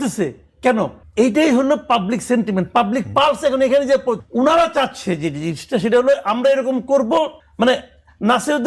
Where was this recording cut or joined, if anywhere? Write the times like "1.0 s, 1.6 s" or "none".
1.0 s, 4.2 s, 7.4 s